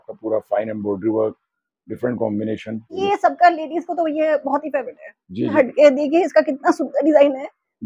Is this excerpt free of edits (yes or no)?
no